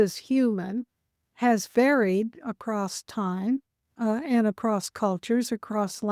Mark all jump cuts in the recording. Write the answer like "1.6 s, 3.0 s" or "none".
1.3 s, 3.8 s